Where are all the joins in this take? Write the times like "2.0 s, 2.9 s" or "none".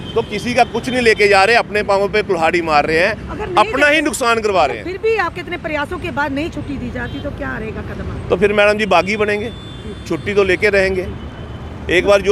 none